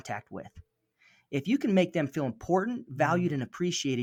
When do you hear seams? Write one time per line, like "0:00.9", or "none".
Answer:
none

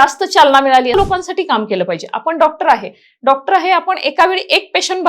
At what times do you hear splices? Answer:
0:00.9

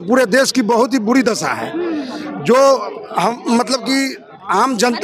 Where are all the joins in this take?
none

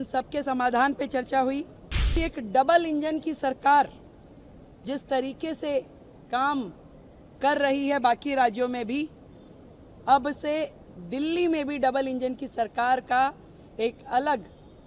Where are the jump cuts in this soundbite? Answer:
0:02.2

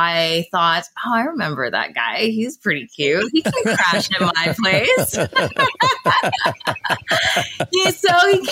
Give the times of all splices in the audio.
none

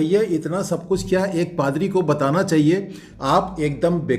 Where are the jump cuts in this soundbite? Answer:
0:03.2

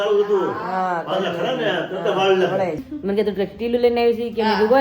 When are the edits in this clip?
0:02.9

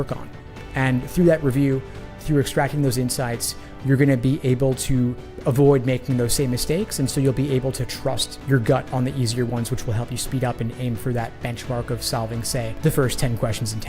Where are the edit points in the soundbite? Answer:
0:12.7

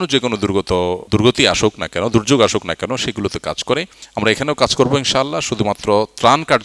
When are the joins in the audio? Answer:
0:01.0
0:04.0

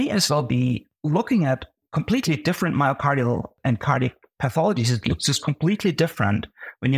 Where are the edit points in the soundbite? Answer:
0:00.9
0:01.8
0:03.6

